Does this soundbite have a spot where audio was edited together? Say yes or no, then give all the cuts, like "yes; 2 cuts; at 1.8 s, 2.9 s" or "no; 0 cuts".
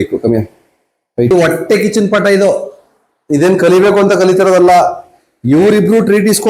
yes; 1 cut; at 1.3 s